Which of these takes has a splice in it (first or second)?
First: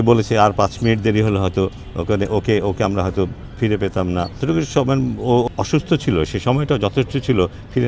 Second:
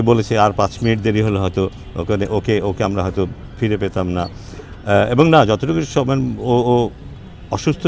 first